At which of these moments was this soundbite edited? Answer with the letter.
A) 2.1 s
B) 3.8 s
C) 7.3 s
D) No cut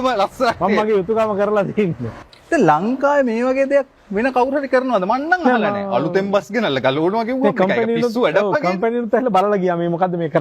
A